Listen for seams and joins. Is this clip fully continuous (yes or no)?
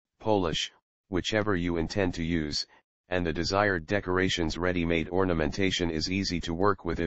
yes